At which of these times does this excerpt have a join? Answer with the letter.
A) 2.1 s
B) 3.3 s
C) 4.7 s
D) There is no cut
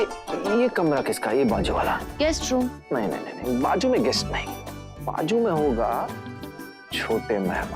A